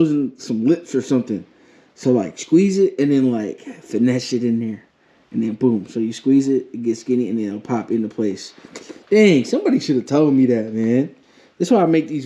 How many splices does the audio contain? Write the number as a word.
zero